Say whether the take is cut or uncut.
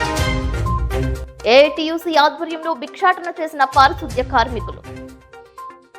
cut